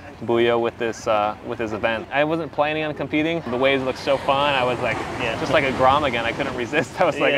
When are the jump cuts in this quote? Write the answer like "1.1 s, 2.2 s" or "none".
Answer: 2.1 s, 3.5 s